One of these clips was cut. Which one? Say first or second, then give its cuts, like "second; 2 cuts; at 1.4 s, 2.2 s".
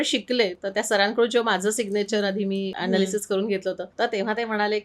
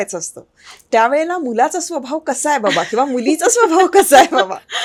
first; 2 cuts; at 2.7 s, 3.9 s